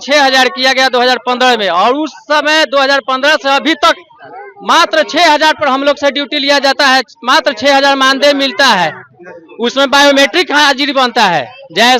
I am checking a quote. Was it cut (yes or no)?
no